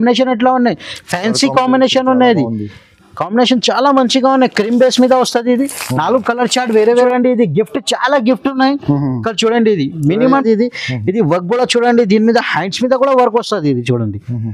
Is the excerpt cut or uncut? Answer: cut